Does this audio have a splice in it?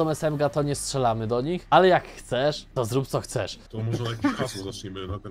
yes; 1 cut; at 3.6 s

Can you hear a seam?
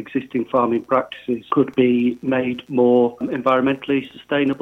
yes; 2 cuts; at 1.5 s, 3.3 s

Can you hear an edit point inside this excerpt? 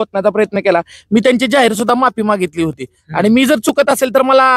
no; 0 cuts

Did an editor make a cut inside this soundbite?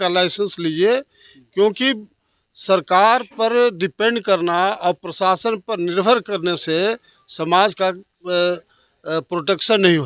no; 0 cuts

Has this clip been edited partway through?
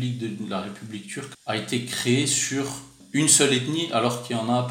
yes; 2 cuts; at 1.3 s, 3.0 s

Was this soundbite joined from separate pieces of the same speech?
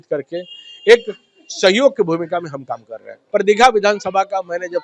yes; 1 cut; at 3.2 s

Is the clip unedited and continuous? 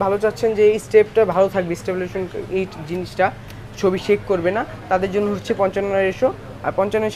yes; 0 cuts

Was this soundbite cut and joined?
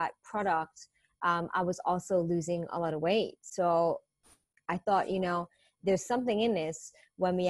no; 0 cuts

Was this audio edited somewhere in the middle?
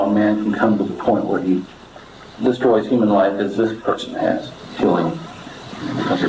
yes; 1 cut; at 4.6 s

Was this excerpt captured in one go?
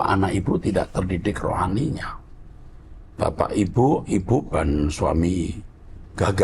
yes; 0 cuts

